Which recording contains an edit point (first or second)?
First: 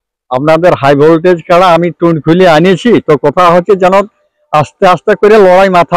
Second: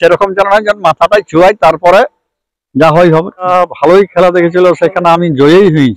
second